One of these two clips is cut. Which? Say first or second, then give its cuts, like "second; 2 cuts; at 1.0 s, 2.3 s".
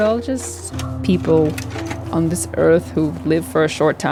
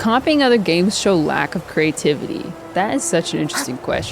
second; 1 cut; at 2.5 s